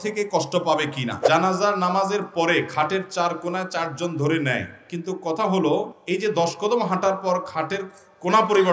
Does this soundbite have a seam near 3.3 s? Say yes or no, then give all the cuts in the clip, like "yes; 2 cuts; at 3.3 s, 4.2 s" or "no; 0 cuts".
no; 2 cuts; at 1.1 s, 6.0 s